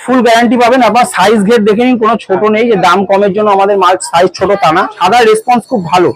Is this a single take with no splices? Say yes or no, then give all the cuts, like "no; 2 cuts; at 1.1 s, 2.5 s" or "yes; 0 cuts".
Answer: no; 1 cut; at 4.9 s